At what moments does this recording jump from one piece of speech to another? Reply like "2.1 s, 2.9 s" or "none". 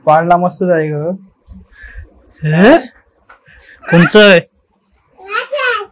none